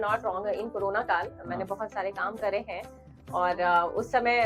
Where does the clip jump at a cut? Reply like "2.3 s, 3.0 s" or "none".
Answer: none

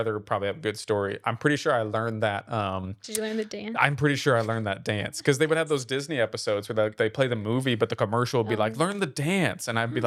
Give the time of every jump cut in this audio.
none

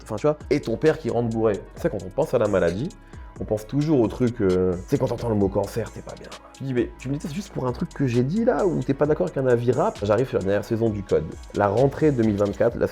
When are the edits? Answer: 1.7 s, 6.5 s, 10.0 s

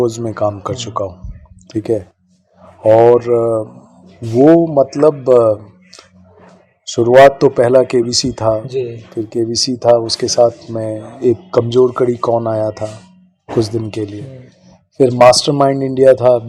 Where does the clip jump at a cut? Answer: none

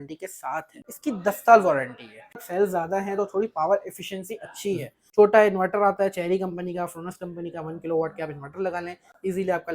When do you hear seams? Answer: 0.9 s, 2.4 s, 5.0 s

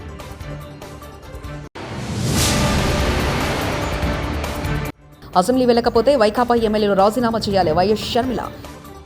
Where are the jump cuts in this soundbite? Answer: 1.5 s

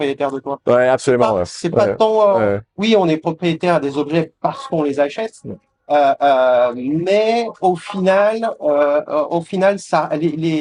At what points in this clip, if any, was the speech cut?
none

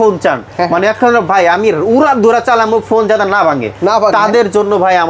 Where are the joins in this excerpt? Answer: none

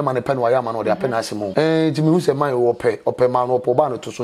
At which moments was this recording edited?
1.5 s

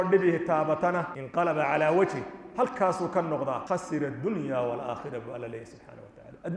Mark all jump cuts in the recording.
1.2 s, 3.6 s

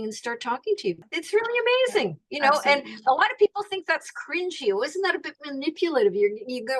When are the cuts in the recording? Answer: 1.1 s

